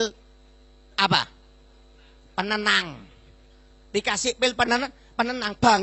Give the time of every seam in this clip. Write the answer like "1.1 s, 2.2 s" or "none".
none